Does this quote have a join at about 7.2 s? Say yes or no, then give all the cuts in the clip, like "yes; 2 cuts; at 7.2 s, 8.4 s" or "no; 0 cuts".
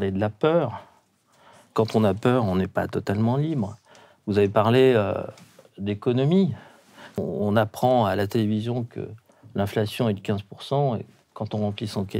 yes; 1 cut; at 7.2 s